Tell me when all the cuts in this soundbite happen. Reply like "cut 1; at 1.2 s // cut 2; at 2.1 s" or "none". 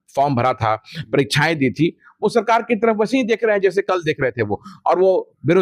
none